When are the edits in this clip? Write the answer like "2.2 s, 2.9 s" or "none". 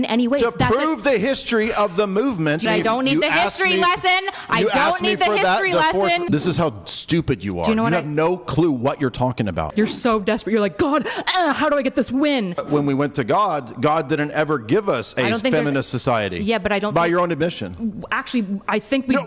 2.6 s, 6.2 s, 9.7 s, 12.6 s